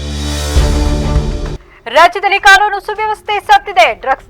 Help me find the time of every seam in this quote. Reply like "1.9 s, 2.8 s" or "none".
1.6 s